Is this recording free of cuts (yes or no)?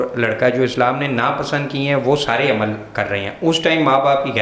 yes